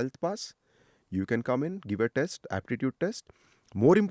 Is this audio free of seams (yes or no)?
yes